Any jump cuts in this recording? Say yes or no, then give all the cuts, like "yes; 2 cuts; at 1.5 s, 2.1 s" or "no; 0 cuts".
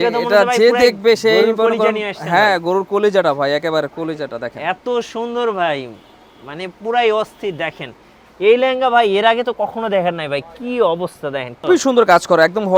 no; 0 cuts